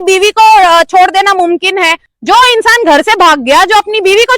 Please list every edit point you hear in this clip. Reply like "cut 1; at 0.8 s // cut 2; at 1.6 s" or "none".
cut 1; at 2.0 s